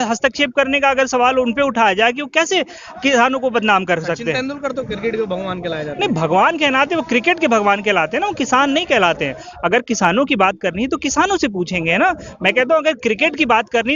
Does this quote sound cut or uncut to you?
uncut